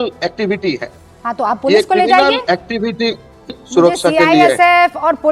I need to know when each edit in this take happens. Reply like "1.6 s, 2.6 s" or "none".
3.5 s